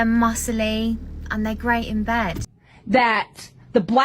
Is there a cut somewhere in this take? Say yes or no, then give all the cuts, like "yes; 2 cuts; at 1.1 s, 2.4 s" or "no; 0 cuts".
yes; 1 cut; at 2.6 s